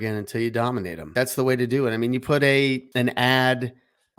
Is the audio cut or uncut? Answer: cut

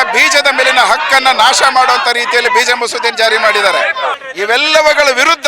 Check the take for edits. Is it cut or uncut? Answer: cut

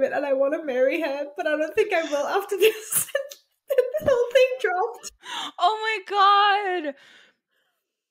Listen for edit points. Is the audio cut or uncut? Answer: uncut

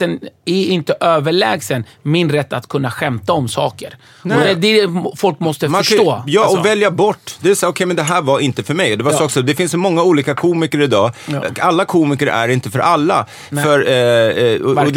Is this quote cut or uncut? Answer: uncut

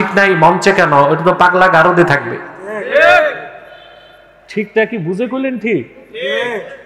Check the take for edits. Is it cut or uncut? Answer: uncut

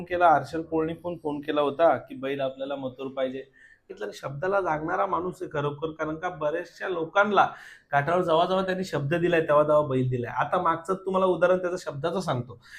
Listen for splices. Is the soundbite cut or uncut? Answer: cut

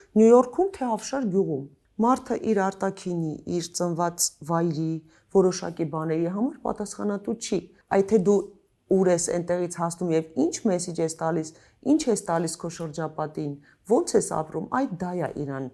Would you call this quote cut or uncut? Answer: uncut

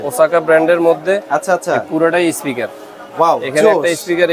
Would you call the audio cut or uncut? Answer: uncut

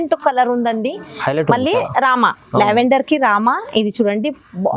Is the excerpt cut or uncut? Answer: uncut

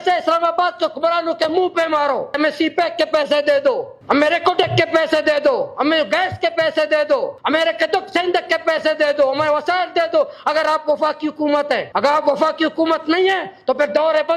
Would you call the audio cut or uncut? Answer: cut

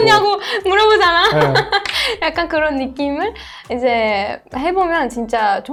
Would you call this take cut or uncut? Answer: uncut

